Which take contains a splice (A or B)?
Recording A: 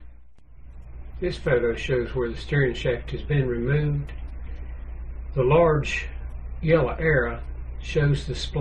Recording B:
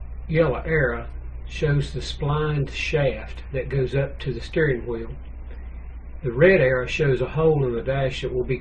B